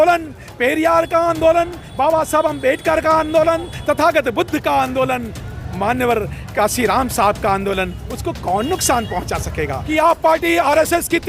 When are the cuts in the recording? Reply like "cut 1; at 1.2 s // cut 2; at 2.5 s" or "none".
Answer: cut 1; at 9.8 s